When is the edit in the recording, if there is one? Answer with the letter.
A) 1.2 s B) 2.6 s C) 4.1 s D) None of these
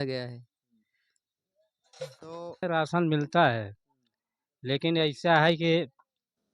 B